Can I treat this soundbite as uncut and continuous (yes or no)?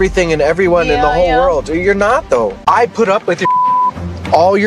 no